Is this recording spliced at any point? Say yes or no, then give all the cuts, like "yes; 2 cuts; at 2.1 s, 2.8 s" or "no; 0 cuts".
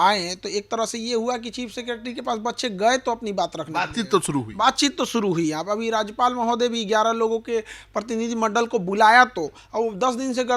no; 0 cuts